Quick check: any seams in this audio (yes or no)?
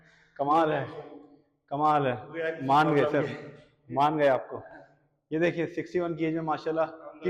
no